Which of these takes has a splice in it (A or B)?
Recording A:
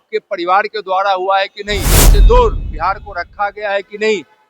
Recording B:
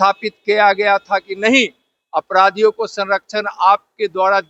A